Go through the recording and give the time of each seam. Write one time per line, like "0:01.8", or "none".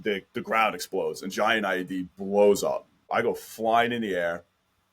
0:03.0